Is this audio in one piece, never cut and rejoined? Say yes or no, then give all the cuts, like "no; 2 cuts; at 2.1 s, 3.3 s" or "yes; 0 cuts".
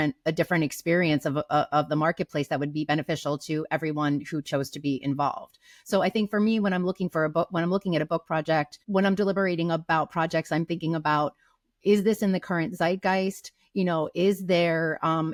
yes; 0 cuts